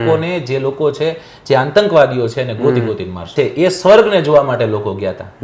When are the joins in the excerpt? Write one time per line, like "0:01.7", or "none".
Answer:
0:03.3